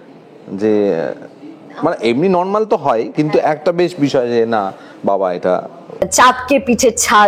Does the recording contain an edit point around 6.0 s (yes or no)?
yes